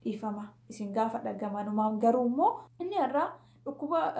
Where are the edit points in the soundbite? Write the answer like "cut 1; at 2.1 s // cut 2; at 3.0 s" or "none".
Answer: cut 1; at 2.7 s